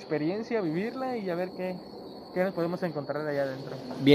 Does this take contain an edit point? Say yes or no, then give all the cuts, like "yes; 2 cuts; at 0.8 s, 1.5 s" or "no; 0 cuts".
no; 0 cuts